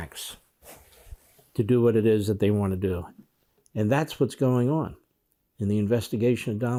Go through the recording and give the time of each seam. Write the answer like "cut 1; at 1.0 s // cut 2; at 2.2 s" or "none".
none